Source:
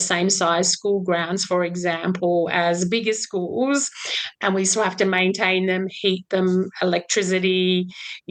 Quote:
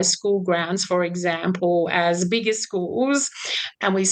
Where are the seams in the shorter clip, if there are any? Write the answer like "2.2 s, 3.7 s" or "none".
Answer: none